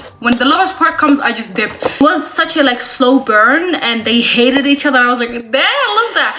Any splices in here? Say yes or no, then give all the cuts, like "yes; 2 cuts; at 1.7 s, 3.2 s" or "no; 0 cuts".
no; 0 cuts